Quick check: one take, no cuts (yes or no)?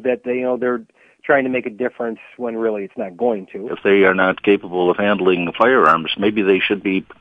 no